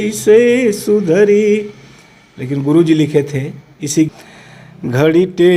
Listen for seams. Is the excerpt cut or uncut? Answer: cut